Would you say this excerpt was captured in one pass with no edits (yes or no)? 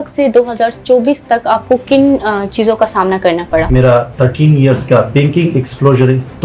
no